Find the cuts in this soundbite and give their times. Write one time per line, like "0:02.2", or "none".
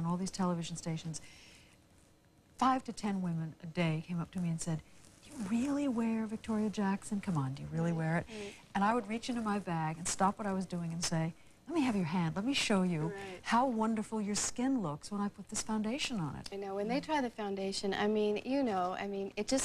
0:16.4